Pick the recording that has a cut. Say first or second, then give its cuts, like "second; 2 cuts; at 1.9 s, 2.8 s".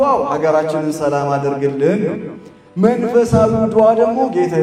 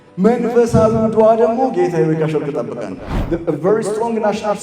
second; 1 cut; at 3.1 s